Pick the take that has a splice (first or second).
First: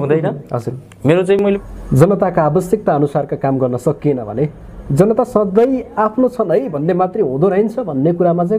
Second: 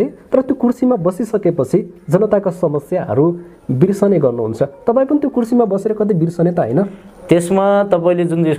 first